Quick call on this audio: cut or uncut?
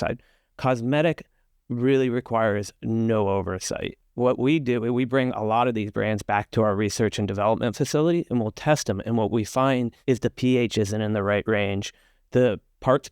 cut